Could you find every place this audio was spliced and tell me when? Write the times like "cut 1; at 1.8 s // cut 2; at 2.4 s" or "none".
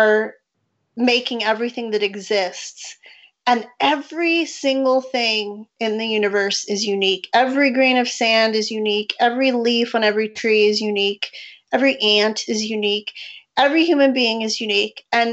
none